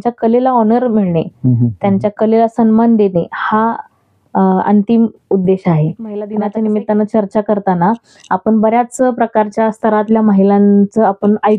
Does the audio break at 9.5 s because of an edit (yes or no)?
no